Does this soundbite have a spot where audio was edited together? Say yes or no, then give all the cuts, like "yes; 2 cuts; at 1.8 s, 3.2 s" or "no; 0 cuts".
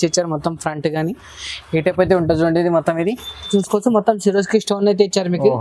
yes; 1 cut; at 3.5 s